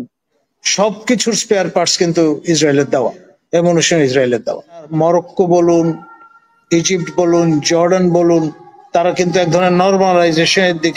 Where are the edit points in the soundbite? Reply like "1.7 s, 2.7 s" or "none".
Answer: 4.9 s